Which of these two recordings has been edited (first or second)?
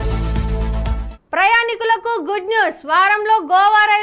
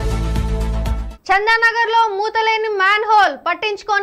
second